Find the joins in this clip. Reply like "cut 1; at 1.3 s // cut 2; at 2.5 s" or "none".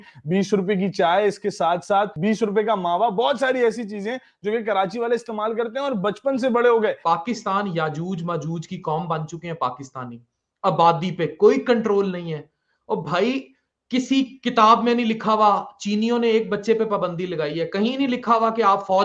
cut 1; at 7.0 s